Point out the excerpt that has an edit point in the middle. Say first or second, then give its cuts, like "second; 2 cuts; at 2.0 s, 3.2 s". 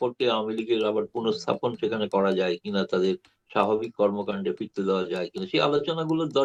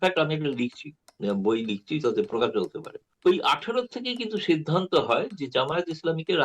second; 1 cut; at 2.7 s